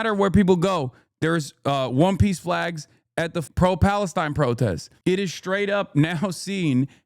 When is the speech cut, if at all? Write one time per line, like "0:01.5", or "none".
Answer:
0:03.4
0:04.9

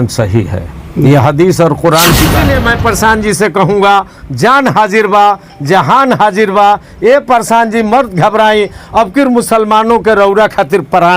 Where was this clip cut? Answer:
0:02.5

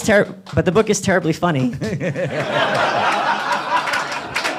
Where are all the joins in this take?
none

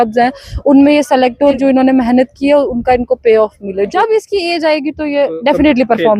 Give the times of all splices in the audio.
0:01.6
0:03.9

